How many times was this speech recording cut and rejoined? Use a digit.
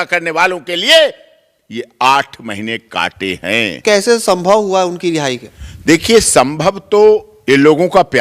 1